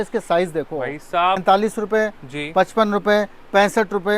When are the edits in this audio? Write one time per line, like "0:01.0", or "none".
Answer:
0:01.4